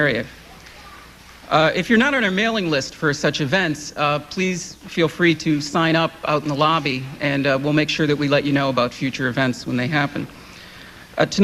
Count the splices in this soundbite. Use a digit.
0